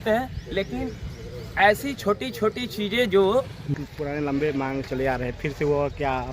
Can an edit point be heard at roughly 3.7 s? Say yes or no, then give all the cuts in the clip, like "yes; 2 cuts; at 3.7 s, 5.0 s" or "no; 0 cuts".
yes; 1 cut; at 3.7 s